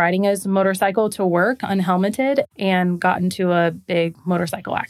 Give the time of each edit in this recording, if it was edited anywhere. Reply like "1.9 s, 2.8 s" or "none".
2.5 s